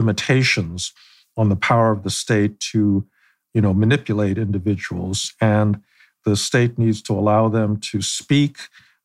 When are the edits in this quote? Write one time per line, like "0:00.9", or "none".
0:06.1